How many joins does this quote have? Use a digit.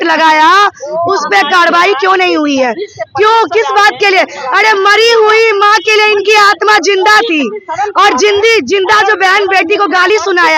0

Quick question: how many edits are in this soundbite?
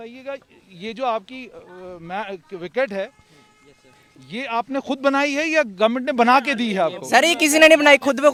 0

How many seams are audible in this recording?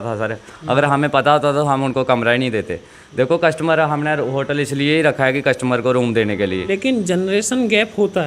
1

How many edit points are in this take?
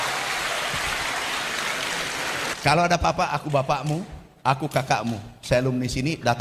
1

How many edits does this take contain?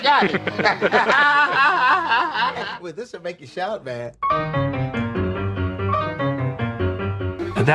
1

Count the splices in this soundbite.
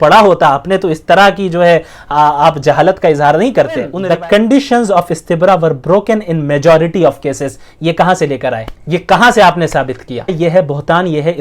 3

